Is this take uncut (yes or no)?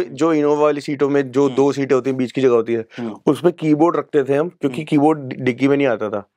yes